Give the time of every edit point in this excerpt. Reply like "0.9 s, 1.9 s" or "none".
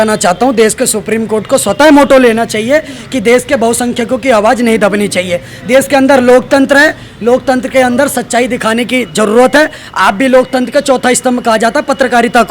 none